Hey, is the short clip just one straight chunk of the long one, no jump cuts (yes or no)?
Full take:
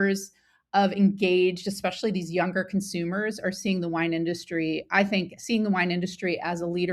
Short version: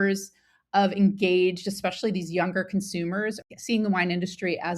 no